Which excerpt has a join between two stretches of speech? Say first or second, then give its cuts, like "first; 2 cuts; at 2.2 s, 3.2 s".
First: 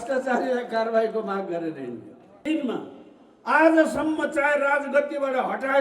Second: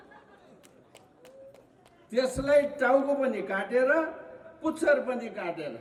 first; 1 cut; at 2.4 s